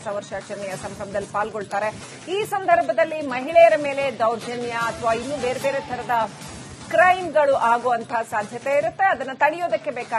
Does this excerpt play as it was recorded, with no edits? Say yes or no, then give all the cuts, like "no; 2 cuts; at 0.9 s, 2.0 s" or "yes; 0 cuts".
yes; 0 cuts